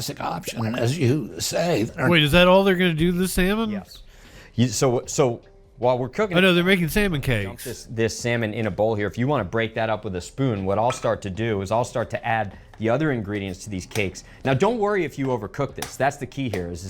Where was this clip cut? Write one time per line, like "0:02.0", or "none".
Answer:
0:01.9